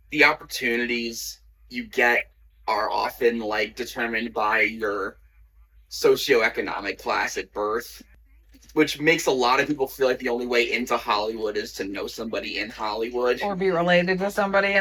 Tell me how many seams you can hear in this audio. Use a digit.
0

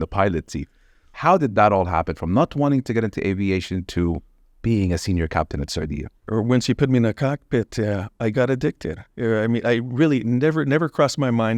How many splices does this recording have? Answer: 1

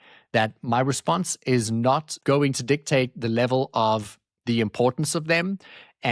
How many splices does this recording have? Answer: 1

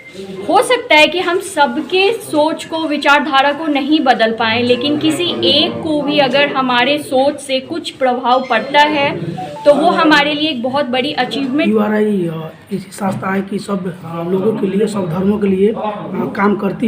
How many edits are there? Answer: 1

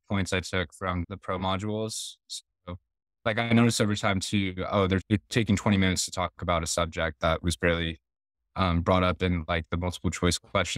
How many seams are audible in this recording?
2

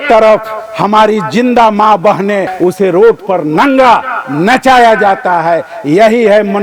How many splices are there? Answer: 1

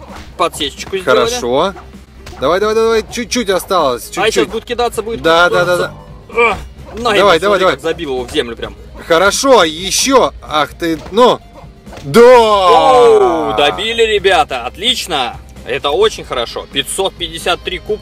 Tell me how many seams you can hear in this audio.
0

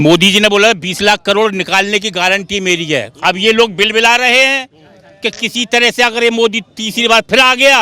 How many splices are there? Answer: 0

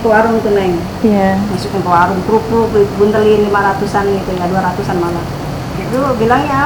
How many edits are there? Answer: 0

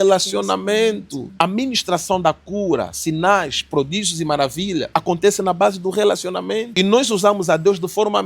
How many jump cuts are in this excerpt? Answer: 3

